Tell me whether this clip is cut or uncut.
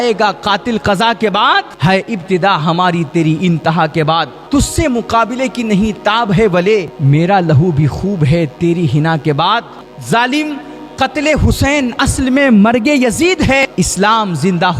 cut